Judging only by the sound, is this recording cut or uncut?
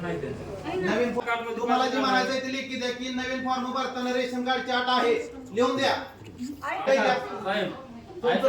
cut